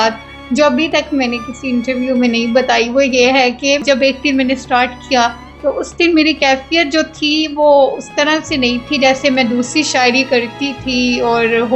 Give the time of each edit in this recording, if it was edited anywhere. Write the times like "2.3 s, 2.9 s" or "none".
3.8 s